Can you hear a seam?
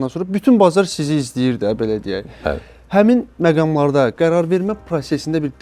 no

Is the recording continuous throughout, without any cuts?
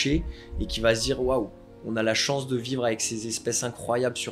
yes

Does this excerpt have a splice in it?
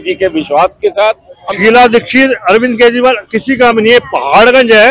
yes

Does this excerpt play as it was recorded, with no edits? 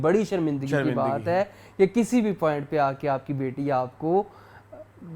yes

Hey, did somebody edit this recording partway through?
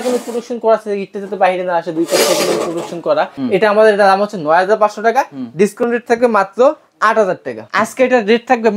yes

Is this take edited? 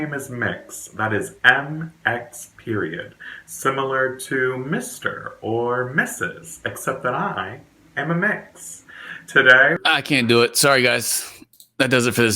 yes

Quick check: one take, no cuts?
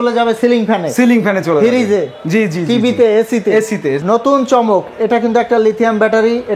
no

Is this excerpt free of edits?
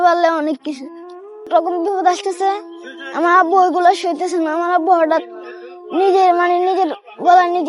no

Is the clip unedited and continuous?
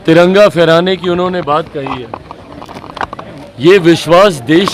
yes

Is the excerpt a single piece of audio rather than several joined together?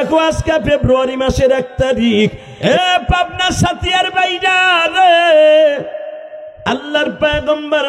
no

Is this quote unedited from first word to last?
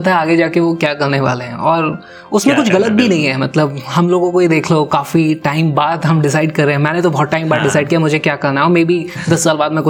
yes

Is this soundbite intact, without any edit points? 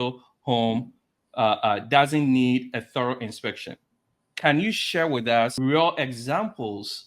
no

